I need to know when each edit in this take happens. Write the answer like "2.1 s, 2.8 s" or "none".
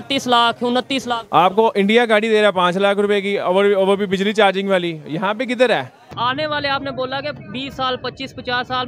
6.1 s